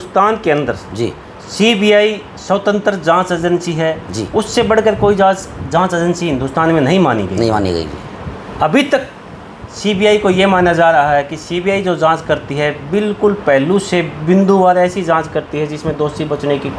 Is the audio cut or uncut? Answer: uncut